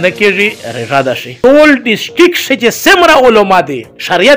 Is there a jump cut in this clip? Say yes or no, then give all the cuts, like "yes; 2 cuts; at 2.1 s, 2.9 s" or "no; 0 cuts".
yes; 1 cut; at 1.3 s